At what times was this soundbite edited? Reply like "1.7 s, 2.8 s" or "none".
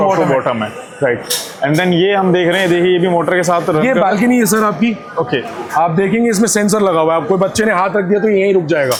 none